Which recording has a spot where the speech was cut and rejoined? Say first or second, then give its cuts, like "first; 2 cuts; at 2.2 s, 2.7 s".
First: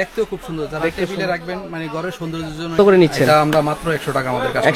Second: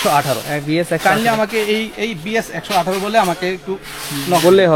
first; 1 cut; at 2.8 s